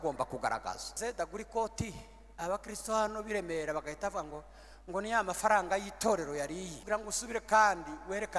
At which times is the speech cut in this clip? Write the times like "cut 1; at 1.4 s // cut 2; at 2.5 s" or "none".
cut 1; at 1.0 s // cut 2; at 6.8 s